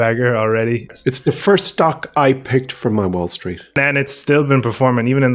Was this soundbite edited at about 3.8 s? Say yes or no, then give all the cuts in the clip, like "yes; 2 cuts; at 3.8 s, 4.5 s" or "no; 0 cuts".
yes; 2 cuts; at 0.9 s, 3.8 s